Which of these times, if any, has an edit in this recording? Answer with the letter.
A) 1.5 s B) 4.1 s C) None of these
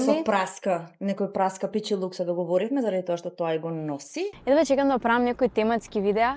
B